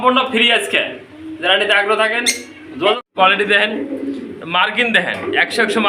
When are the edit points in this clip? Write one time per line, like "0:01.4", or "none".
0:03.0